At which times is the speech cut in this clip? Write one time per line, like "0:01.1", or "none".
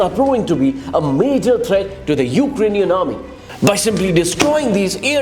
0:03.4